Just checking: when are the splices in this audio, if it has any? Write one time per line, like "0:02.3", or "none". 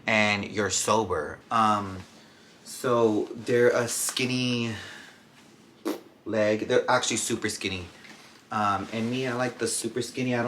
0:01.4